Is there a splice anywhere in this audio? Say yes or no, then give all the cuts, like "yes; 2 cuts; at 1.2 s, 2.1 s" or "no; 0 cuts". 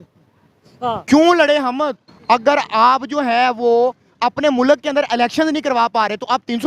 yes; 1 cut; at 2.1 s